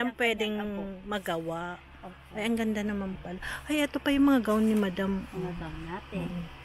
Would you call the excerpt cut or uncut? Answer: uncut